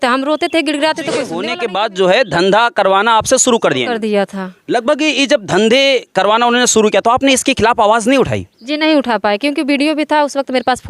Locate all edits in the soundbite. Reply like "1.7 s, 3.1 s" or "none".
1.4 s